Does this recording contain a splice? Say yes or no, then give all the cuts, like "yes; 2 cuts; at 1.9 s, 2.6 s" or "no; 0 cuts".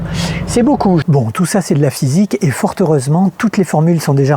yes; 1 cut; at 1.0 s